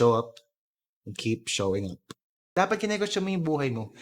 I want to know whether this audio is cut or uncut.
cut